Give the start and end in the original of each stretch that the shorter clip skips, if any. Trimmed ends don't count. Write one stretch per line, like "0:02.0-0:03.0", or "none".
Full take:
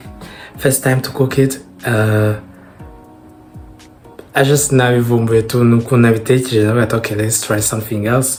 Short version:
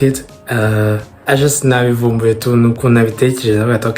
0:02.5-0:04.2